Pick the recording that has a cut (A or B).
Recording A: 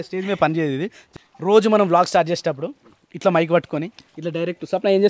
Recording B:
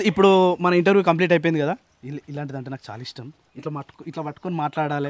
A